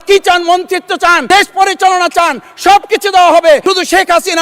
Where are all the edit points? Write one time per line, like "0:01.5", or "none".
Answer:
0:01.2
0:03.6